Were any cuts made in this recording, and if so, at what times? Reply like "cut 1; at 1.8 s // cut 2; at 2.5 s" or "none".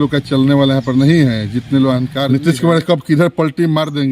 cut 1; at 2.3 s